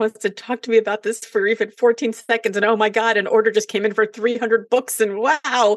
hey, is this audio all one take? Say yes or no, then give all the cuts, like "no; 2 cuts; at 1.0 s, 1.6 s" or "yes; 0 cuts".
yes; 0 cuts